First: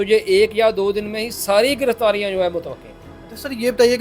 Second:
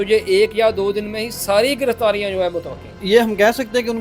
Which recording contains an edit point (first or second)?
second